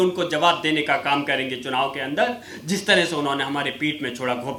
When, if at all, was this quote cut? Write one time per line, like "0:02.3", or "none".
none